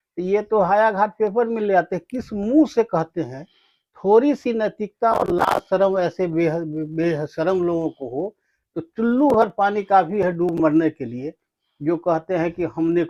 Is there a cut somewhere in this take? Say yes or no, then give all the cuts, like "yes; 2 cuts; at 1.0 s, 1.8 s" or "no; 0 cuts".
no; 0 cuts